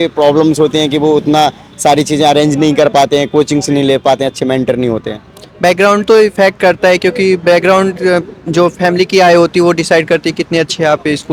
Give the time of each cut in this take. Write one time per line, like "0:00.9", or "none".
none